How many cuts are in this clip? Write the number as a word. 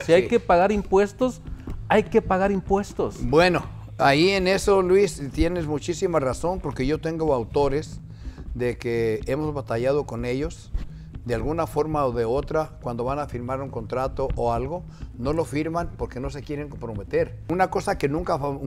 one